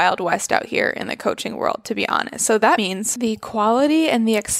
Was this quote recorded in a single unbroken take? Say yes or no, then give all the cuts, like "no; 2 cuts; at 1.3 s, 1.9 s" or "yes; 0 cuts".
no; 1 cut; at 2.9 s